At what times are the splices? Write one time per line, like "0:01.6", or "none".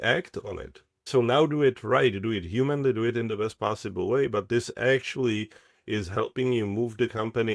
0:01.1